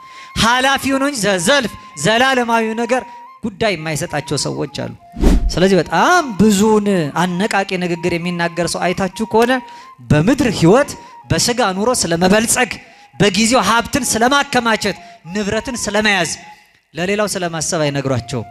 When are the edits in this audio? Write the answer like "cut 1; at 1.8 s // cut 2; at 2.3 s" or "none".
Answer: none